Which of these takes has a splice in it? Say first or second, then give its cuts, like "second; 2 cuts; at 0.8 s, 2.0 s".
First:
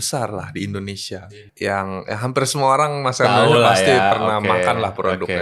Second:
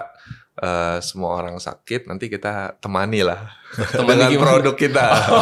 first; 1 cut; at 1.3 s